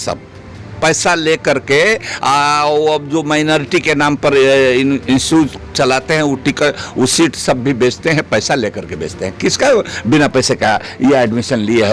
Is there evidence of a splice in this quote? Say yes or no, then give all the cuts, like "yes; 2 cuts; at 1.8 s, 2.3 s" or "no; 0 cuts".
no; 0 cuts